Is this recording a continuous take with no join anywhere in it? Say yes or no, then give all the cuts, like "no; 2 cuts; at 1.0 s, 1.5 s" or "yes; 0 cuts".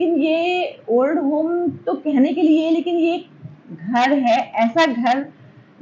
yes; 0 cuts